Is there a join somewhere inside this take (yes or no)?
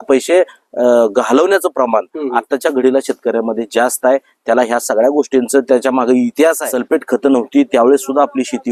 yes